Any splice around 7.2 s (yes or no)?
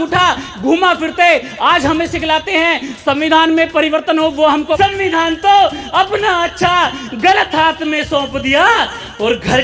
no